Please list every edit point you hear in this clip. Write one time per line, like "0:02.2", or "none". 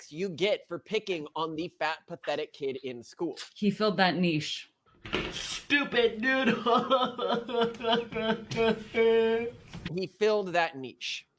0:04.9
0:09.9

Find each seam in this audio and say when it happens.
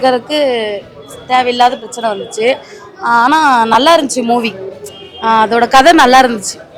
none

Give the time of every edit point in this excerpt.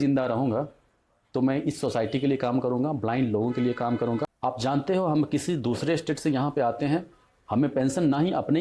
0:04.3

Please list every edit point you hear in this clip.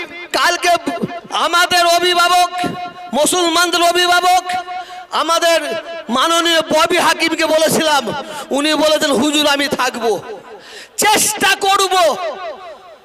none

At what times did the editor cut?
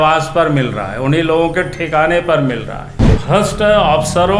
0:03.2

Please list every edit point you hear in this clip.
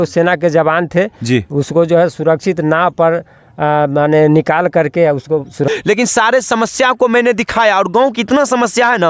0:05.7

